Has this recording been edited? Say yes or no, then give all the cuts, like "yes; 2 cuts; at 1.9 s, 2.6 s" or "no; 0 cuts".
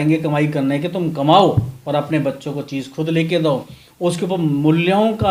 no; 0 cuts